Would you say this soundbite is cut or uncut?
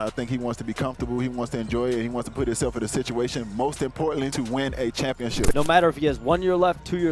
cut